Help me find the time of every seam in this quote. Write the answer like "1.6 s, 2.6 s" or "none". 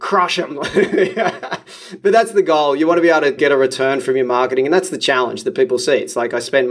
1.9 s, 3.4 s

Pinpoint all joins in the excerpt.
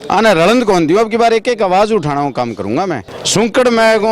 3.2 s

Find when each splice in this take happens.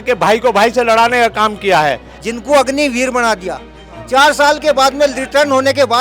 2.1 s

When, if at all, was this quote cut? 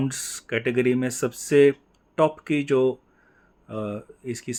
none

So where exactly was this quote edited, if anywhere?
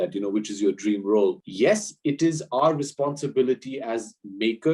1.5 s

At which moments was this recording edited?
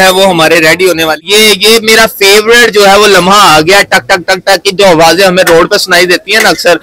1.2 s

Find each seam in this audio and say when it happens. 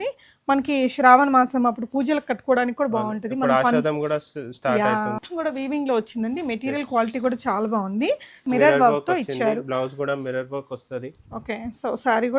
5.2 s, 8.4 s

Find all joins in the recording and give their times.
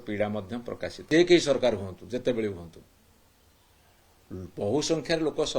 1.0 s

